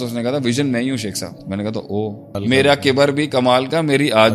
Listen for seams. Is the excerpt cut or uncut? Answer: cut